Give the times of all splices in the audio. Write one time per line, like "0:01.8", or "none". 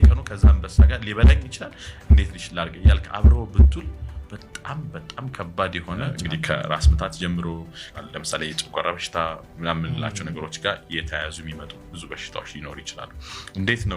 0:06.1
0:08.0